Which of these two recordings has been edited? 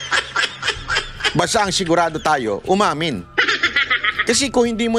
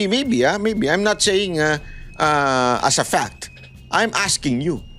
first; 1 cut; at 1.0 s

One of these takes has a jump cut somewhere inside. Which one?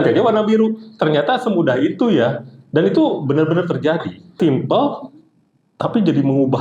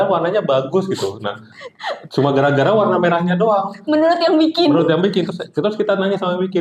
first; 1 cut; at 4.4 s

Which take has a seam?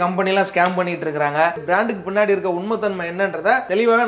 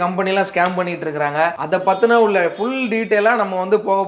first; 1 cut; at 1.6 s

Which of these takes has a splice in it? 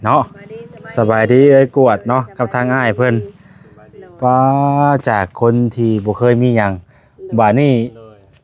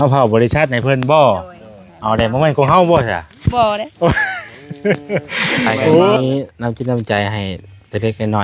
second; 1 cut; at 6.2 s

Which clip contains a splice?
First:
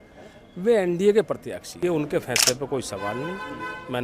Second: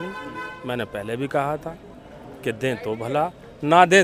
first; 1 cut; at 1.8 s

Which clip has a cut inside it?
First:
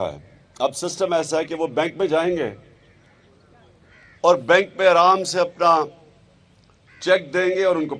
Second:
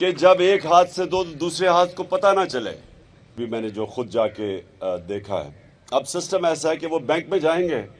second; 1 cut; at 3.4 s

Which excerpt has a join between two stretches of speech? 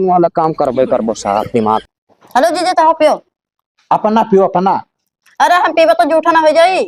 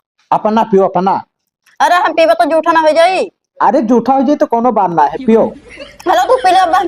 first; 1 cut; at 1.9 s

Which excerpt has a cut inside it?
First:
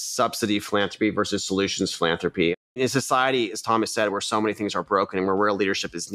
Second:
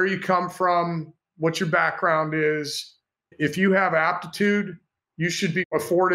first; 1 cut; at 2.7 s

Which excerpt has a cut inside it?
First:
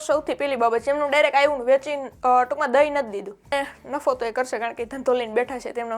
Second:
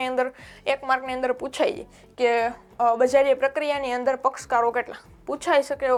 first; 1 cut; at 3.5 s

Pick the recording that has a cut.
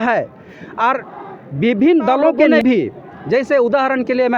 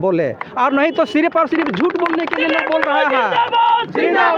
first; 1 cut; at 2.5 s

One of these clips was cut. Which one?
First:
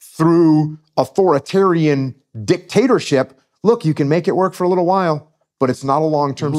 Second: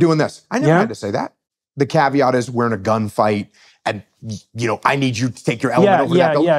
second; 1 cut; at 1.3 s

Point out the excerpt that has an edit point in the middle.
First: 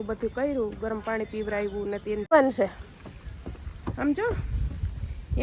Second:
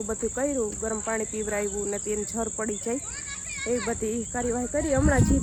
first; 1 cut; at 2.3 s

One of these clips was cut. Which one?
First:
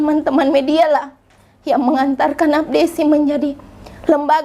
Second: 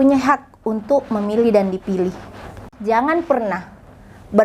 second; 1 cut; at 2.7 s

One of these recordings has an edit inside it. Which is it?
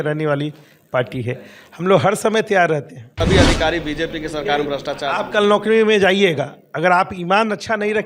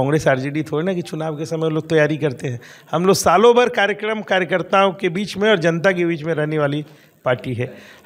first; 1 cut; at 3.1 s

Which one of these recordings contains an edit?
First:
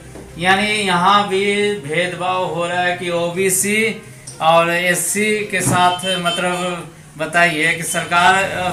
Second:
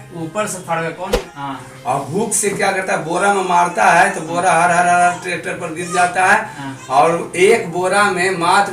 second; 1 cut; at 1.1 s

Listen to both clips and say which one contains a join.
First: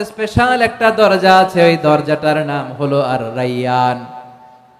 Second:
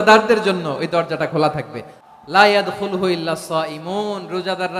second; 1 cut; at 1.9 s

